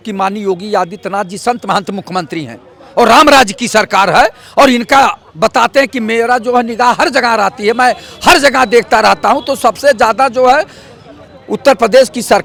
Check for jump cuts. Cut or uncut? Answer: uncut